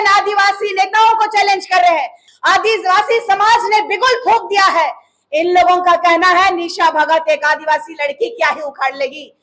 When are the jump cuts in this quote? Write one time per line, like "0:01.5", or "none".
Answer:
0:02.2